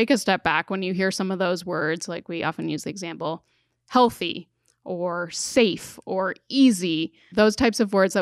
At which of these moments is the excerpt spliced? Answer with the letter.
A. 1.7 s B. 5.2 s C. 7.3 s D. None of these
C